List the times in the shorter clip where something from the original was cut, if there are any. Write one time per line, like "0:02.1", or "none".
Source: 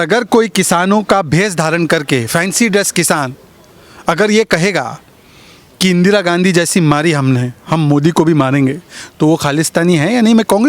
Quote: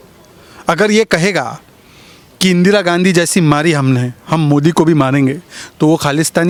none